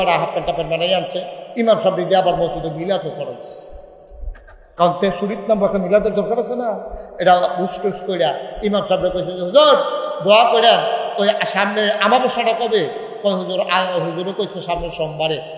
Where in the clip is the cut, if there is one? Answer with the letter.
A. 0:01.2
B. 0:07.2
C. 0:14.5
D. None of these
D